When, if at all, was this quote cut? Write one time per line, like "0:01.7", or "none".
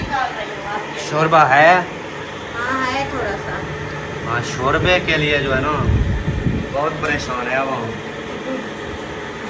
none